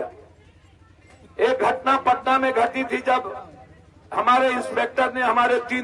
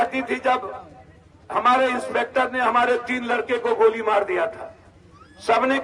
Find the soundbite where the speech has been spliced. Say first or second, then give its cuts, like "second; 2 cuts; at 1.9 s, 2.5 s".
first; 1 cut; at 1.2 s